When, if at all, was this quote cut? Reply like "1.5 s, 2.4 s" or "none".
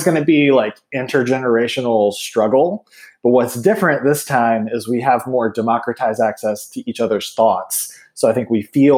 none